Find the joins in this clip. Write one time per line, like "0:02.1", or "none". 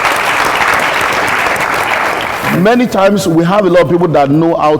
0:02.4

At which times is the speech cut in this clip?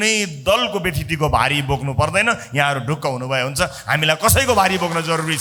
none

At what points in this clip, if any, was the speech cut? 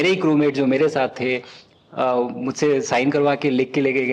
none

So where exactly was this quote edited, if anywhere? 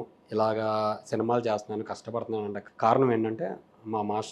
0:02.6

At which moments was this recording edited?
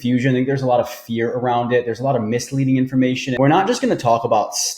0:03.3

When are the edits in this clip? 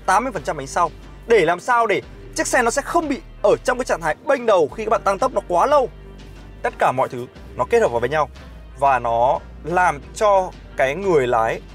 0:06.1

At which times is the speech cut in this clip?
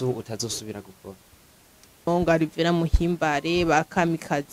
0:02.1

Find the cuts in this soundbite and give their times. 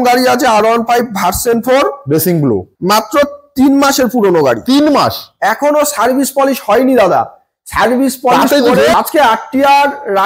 0:02.7
0:08.9

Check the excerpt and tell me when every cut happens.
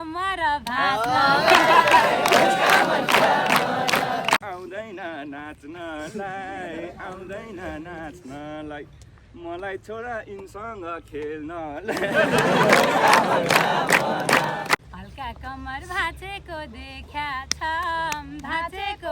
0:04.4
0:14.8

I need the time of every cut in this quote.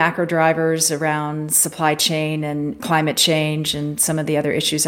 0:02.8

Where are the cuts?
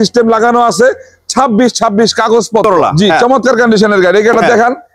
0:02.6

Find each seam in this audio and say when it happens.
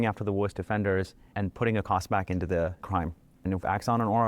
0:03.4

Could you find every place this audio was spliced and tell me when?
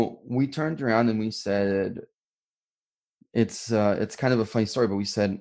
0:02.5

